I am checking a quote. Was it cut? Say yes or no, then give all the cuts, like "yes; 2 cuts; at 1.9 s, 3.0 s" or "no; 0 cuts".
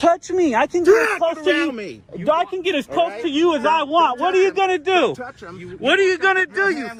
no; 0 cuts